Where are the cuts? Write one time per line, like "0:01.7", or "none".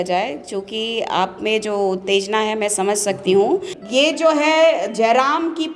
0:03.8